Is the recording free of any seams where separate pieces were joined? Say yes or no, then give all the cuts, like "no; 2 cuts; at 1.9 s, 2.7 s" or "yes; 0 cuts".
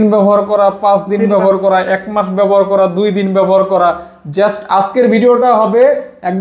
yes; 0 cuts